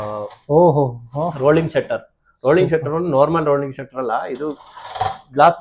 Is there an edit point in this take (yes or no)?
no